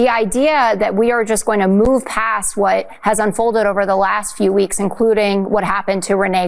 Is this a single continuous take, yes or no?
yes